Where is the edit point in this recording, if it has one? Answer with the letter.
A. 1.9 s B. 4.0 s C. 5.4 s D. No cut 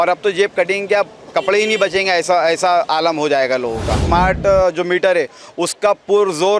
B